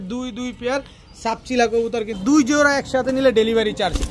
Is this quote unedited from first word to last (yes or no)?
no